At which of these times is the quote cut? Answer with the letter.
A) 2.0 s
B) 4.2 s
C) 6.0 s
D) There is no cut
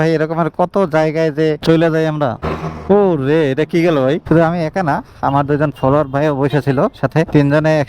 B